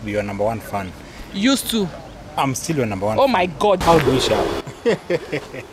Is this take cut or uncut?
cut